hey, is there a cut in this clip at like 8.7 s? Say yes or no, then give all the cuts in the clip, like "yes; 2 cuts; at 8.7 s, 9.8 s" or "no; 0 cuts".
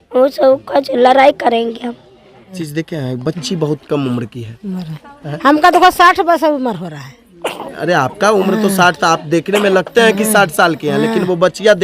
no; 1 cut; at 2.6 s